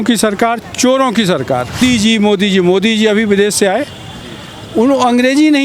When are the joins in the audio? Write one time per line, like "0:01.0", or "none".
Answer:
0:01.8